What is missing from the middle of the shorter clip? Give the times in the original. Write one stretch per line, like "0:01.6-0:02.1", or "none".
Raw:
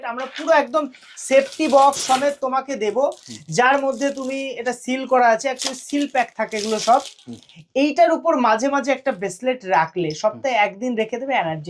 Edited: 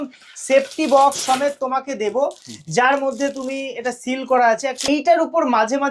0:05.7-0:07.8